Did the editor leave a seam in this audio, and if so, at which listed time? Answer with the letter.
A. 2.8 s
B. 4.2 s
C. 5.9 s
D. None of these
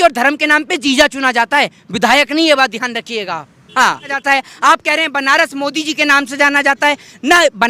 B